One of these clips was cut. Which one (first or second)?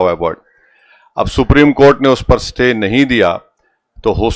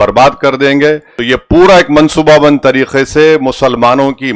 second